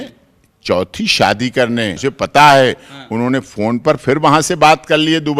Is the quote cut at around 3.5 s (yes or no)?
no